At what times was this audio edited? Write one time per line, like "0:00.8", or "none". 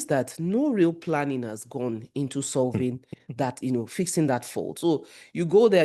none